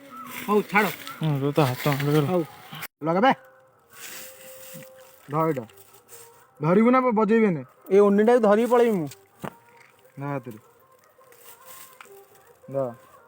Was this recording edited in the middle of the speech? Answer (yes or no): no